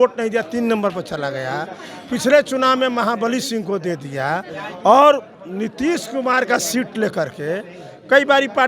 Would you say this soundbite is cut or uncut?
uncut